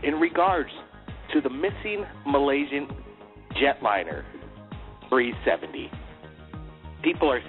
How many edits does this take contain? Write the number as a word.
one